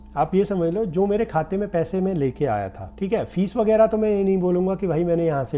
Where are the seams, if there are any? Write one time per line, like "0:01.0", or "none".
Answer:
0:02.8

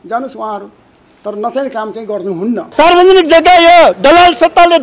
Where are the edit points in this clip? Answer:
0:02.6

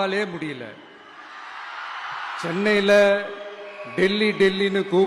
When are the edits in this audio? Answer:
0:02.4

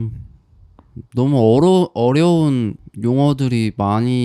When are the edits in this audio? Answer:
0:02.8

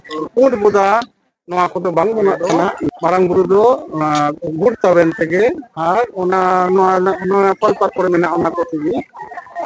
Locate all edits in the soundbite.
0:02.8

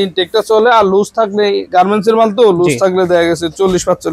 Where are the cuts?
none

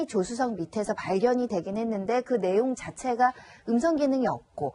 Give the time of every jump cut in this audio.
0:01.2

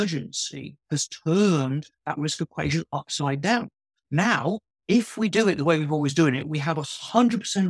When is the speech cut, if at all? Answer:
none

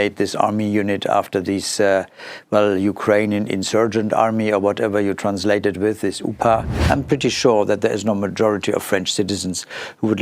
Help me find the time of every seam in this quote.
0:06.8

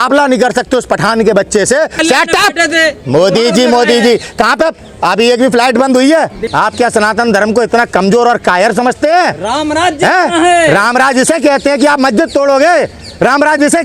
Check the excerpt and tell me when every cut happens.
0:01.9
0:06.4

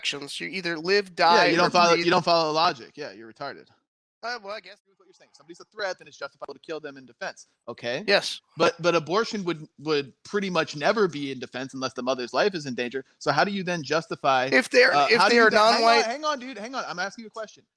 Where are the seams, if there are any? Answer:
0:04.9

